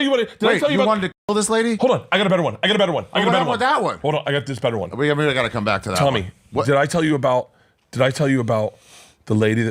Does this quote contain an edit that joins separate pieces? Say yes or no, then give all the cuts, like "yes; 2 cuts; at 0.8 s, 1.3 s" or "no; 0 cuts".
no; 0 cuts